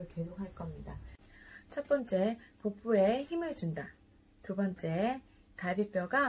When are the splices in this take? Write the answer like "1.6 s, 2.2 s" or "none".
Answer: 1.4 s